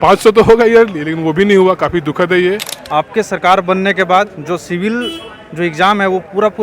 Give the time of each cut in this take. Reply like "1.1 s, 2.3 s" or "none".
2.7 s